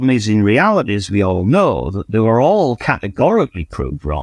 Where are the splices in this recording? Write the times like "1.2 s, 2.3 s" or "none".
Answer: none